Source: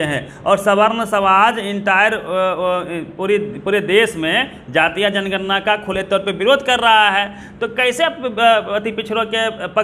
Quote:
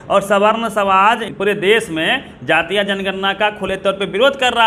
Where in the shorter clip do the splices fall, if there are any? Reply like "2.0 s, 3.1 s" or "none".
1.3 s